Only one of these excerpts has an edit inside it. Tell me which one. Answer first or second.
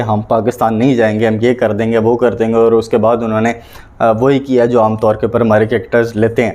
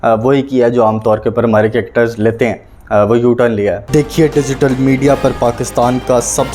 second